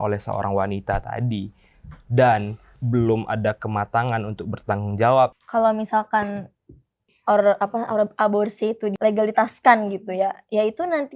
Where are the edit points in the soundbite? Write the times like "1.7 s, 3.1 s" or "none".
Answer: 5.3 s, 8.9 s